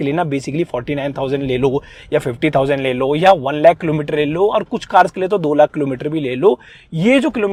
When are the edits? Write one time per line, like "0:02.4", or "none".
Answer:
none